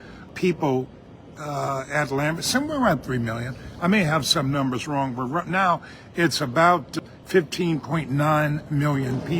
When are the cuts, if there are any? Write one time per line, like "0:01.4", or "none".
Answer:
0:01.3